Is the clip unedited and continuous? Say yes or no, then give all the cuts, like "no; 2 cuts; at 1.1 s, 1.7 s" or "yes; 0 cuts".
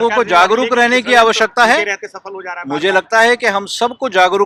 yes; 0 cuts